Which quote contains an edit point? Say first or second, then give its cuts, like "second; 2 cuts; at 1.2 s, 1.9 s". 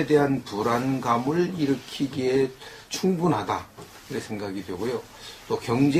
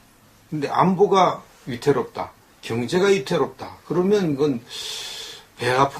second; 1 cut; at 2.1 s